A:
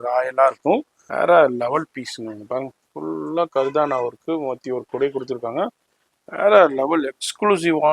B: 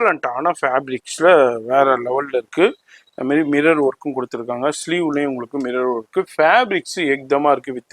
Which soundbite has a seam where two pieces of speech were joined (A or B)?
A